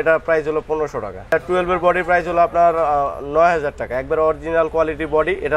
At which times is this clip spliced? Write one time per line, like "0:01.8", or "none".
0:01.3